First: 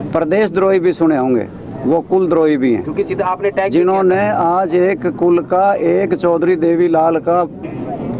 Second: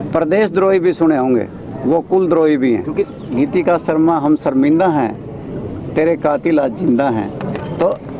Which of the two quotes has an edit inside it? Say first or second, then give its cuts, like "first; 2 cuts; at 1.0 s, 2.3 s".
second; 1 cut; at 3.1 s